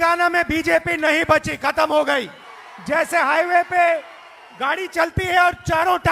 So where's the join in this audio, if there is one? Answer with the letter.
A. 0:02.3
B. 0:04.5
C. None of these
A